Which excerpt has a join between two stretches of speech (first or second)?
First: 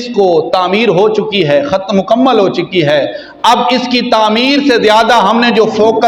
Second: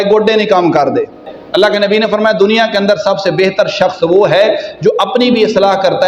second